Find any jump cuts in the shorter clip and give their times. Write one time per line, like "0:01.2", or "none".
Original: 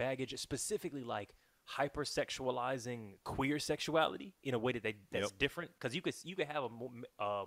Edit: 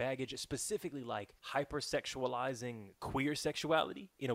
0:01.4